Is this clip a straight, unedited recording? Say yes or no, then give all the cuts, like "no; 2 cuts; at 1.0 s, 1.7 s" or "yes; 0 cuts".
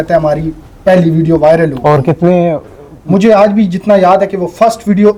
yes; 0 cuts